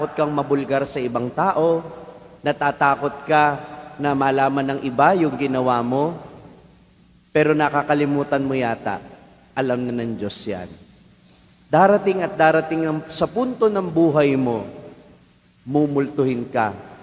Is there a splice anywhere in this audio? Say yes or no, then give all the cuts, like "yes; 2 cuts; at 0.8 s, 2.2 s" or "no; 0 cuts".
yes; 1 cut; at 11.7 s